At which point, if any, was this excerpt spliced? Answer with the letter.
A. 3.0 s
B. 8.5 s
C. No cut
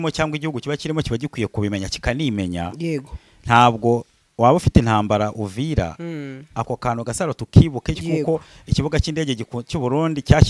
C